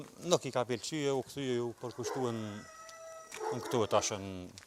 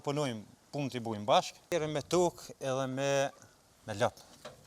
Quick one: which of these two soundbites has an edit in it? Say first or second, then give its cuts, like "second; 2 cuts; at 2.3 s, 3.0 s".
second; 1 cut; at 1.7 s